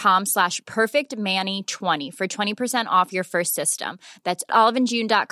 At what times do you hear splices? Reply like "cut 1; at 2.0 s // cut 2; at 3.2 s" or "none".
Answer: cut 1; at 2.0 s